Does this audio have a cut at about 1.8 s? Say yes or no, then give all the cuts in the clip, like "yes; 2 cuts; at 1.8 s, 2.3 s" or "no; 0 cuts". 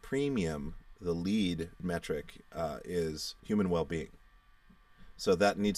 yes; 2 cuts; at 1.8 s, 3.3 s